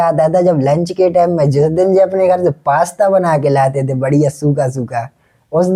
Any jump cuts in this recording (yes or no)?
no